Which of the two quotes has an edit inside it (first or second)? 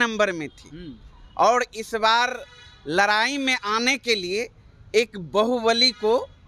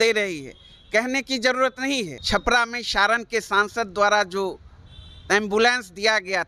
second